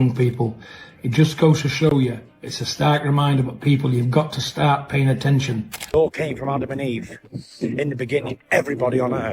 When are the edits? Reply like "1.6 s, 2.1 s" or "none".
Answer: 5.9 s